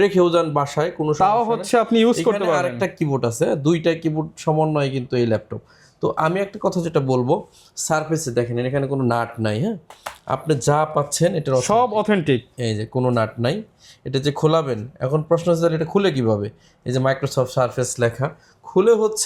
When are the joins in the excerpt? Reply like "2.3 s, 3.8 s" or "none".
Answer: none